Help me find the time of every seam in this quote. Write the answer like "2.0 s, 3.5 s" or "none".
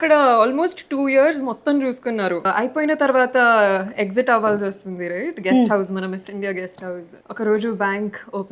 2.4 s, 7.2 s